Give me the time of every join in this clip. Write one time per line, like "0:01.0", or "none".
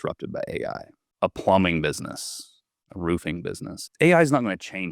0:01.0
0:03.7